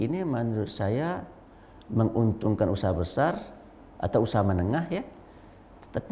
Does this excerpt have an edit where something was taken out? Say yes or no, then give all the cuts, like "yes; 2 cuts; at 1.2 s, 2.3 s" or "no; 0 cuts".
no; 0 cuts